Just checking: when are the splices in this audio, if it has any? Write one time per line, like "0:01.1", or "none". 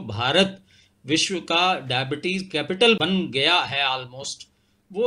0:03.0